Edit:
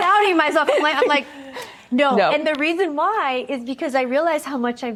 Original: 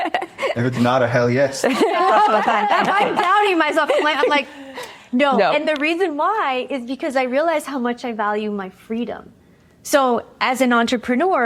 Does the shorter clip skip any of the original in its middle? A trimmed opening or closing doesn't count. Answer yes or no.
no